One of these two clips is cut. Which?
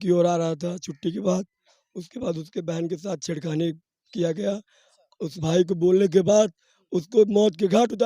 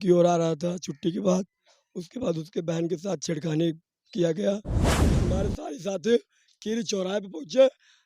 second; 1 cut; at 5.1 s

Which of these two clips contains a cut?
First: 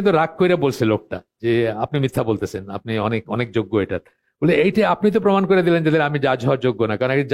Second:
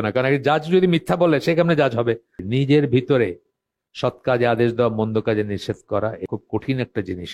second; 2 cuts; at 2.4 s, 6.2 s

